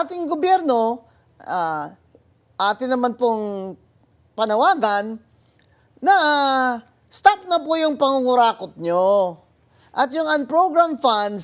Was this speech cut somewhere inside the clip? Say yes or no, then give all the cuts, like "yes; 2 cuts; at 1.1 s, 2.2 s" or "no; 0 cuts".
no; 0 cuts